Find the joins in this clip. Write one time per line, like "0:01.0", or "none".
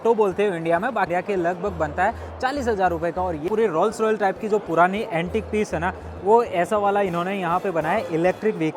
0:01.1
0:03.5